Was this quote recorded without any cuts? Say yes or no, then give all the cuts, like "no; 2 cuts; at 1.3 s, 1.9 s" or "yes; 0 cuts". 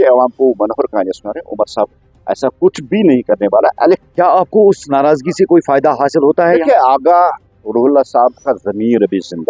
no; 1 cut; at 4.1 s